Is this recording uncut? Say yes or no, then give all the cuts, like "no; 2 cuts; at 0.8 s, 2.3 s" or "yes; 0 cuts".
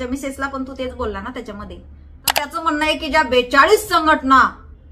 no; 1 cut; at 2.5 s